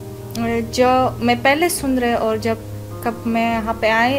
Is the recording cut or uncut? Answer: uncut